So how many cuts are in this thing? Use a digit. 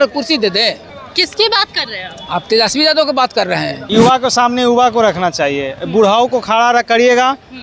2